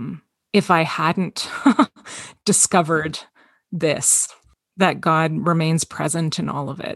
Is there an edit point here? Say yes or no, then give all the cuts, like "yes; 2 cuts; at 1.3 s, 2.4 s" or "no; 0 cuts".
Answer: yes; 1 cut; at 4.6 s